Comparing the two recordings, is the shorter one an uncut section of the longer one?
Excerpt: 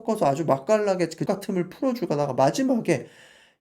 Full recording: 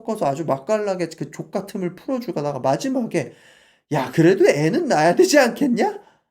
no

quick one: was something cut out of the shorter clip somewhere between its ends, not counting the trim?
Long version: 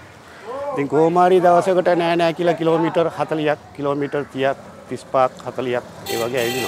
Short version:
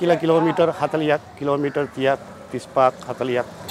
no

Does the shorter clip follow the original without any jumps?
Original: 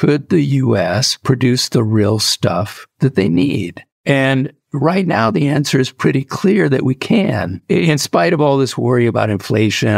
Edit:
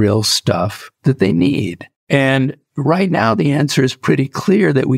yes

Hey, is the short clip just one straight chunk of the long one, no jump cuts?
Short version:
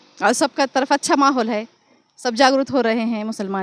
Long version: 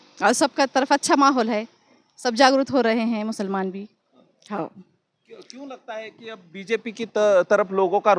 yes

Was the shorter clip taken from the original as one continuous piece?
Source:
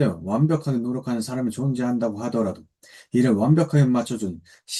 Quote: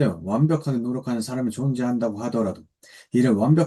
yes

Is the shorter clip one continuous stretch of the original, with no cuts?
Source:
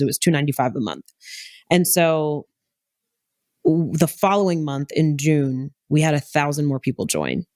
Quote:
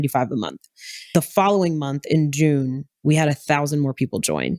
no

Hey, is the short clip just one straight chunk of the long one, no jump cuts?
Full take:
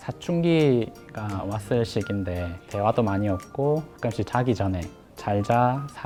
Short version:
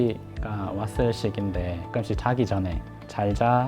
no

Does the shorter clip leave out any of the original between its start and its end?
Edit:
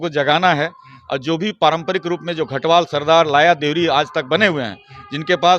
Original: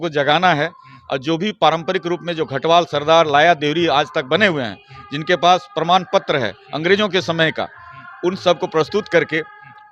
no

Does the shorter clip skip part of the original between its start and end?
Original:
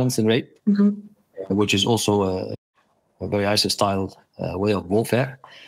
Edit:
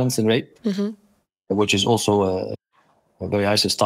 no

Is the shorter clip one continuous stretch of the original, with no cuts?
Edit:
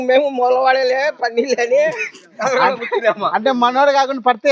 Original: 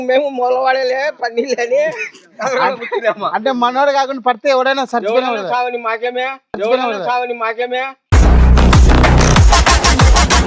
yes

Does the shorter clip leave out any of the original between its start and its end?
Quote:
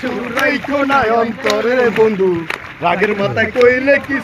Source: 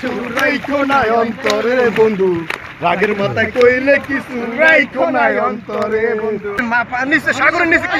no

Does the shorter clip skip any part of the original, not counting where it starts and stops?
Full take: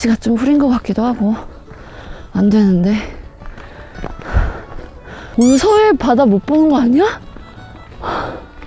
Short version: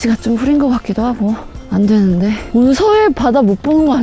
yes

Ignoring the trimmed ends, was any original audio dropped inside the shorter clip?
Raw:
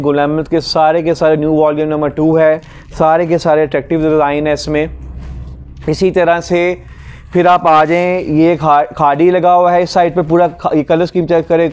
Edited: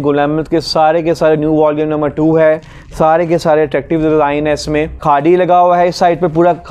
yes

